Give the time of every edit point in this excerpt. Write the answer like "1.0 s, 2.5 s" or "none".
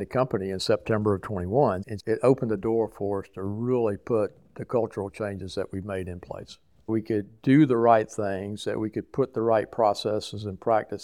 1.9 s, 6.9 s